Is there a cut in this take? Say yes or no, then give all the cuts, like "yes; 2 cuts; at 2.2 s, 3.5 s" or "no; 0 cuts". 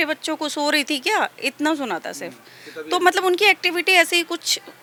no; 0 cuts